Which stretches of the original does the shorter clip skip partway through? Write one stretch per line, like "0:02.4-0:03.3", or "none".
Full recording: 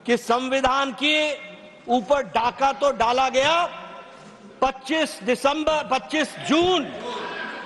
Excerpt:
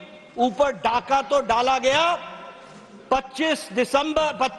none